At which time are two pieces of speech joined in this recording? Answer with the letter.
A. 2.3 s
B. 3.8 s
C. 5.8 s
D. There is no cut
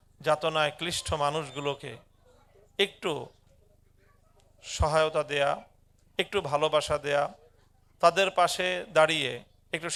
D